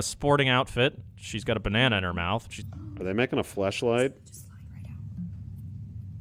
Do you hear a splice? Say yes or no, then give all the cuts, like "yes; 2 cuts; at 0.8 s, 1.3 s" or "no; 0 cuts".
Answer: no; 0 cuts